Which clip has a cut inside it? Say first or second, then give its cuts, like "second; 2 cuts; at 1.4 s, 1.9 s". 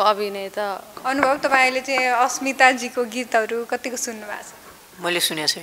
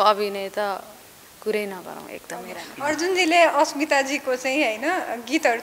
first; 1 cut; at 0.9 s